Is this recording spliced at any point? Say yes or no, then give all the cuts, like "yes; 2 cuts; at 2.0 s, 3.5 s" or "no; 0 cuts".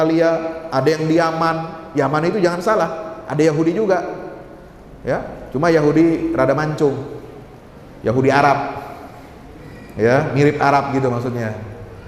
no; 0 cuts